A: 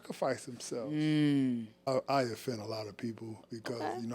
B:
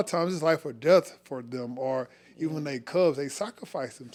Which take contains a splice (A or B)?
A